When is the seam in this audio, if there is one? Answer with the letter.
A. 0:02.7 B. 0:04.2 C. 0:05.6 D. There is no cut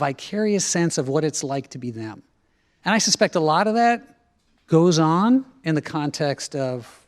A